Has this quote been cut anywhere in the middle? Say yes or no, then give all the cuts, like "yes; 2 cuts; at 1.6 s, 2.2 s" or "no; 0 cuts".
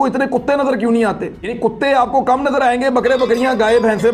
yes; 1 cut; at 1.5 s